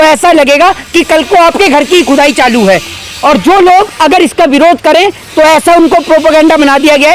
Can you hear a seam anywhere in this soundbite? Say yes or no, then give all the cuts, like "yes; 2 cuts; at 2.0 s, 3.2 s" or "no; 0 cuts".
no; 0 cuts